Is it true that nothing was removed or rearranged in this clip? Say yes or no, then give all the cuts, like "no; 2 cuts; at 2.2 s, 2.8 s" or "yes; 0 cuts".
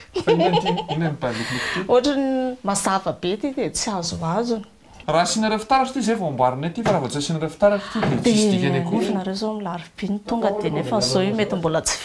no; 1 cut; at 5.0 s